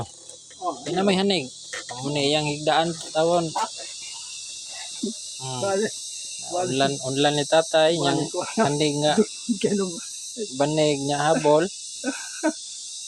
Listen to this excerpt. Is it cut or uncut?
uncut